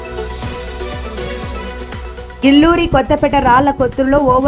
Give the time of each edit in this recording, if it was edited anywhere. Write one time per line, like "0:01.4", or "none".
none